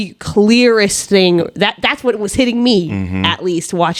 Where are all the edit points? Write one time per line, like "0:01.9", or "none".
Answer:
none